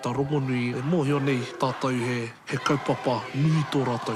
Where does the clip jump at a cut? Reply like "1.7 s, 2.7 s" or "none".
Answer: 0.8 s, 1.5 s, 2.4 s

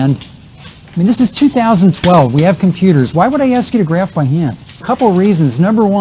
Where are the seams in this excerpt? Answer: 4.8 s

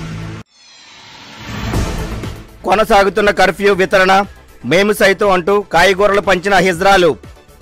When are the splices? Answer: 1.2 s

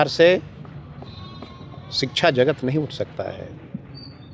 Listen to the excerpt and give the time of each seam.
none

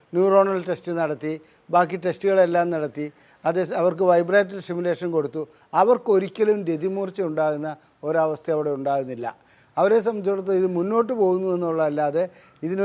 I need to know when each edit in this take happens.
none

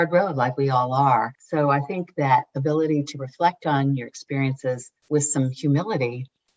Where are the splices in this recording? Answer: 1.4 s

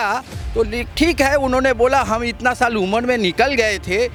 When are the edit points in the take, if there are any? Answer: none

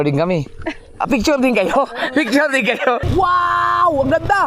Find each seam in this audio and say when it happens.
3.0 s

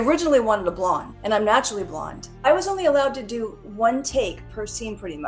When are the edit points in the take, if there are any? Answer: 1.1 s, 2.2 s

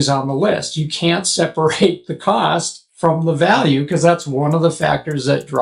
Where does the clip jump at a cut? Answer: none

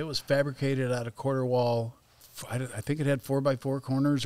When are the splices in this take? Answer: 2.0 s

